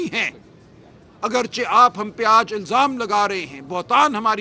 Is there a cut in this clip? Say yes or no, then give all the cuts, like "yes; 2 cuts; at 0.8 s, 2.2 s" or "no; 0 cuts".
no; 0 cuts